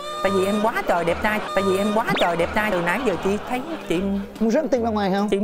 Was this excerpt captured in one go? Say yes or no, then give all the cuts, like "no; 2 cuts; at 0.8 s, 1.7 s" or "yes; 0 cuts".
yes; 0 cuts